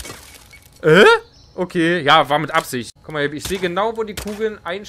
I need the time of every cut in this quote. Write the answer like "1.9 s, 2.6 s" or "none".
2.8 s